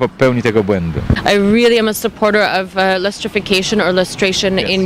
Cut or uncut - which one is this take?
cut